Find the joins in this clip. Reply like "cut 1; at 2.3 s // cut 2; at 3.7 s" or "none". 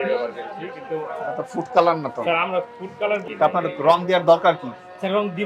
cut 1; at 3.2 s

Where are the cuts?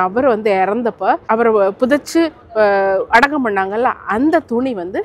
cut 1; at 1.2 s

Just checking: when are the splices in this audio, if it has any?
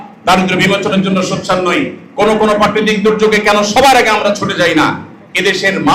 none

